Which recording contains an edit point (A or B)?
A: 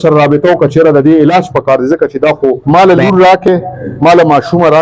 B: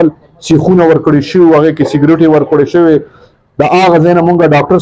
A